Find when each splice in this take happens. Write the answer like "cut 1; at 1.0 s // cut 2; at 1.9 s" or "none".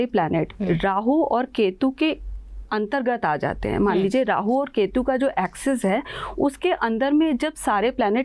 none